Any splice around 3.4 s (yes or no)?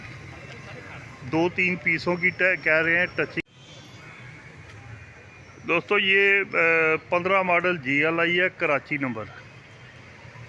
yes